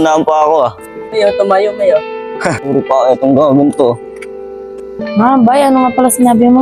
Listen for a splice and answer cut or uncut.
uncut